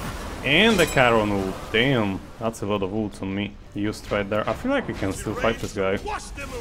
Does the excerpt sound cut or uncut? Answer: cut